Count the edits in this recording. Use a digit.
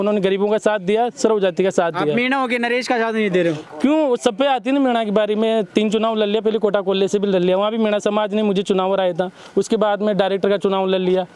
0